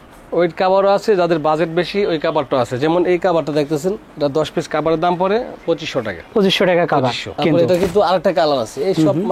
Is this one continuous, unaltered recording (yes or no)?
no